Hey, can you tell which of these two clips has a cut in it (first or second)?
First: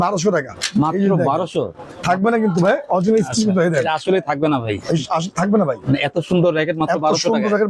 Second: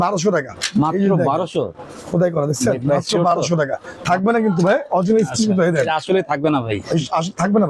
first